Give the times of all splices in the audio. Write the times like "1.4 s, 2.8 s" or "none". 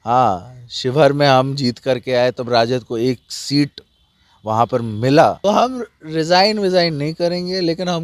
5.4 s